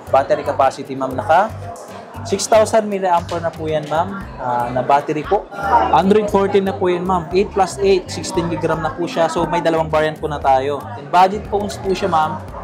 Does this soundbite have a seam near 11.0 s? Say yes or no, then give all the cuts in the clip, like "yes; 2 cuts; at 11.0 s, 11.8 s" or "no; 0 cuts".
yes; 2 cuts; at 5.6 s, 11.0 s